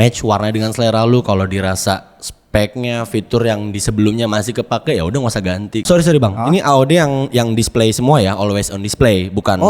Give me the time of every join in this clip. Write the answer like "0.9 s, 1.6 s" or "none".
5.8 s